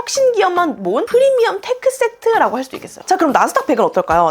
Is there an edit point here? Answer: yes; 1 cut; at 2.9 s

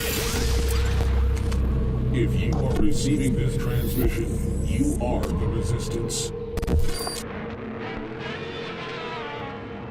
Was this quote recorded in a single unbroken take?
yes; 0 cuts

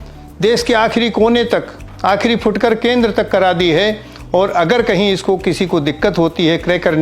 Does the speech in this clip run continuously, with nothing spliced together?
yes; 0 cuts

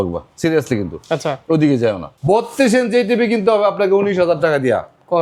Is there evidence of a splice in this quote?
yes; 1 cut; at 2.1 s

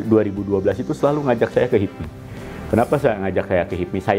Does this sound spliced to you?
no; 0 cuts

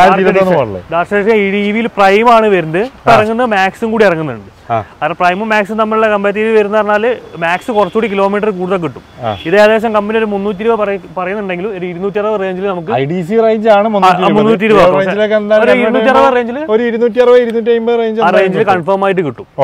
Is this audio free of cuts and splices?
yes; 0 cuts

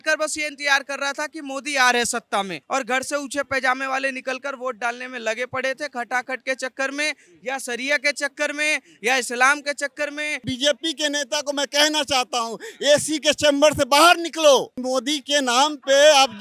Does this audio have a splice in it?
yes; 3 cuts; at 2.6 s, 10.4 s, 14.8 s

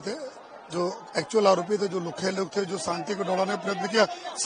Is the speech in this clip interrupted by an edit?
no; 0 cuts

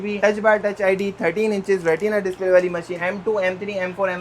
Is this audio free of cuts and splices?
no; 1 cut; at 3.0 s

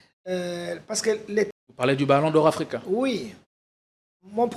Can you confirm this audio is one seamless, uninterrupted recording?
no; 1 cut; at 1.6 s

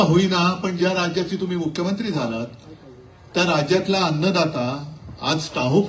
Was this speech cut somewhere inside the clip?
no; 0 cuts

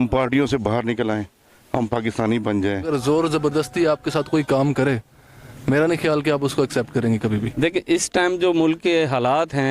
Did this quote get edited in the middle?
yes; 2 cuts; at 2.9 s, 7.4 s

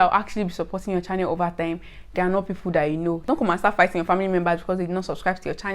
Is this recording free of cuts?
no; 1 cut; at 3.3 s

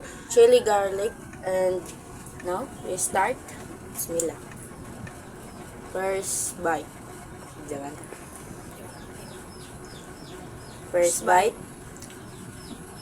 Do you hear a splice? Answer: no; 0 cuts

